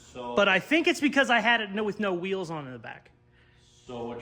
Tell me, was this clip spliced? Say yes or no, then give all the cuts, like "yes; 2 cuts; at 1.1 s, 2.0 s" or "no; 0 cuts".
no; 0 cuts